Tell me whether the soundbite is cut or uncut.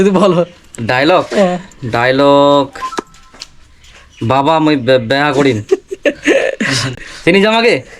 cut